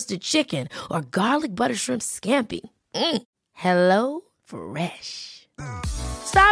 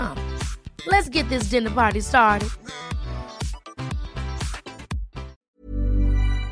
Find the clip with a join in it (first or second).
second